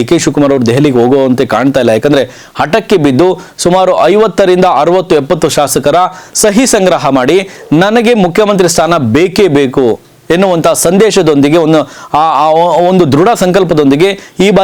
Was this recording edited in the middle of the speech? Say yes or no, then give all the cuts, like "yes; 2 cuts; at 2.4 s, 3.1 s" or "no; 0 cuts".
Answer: no; 0 cuts